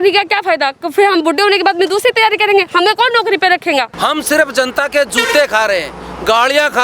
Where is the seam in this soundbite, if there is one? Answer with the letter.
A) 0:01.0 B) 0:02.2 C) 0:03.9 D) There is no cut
C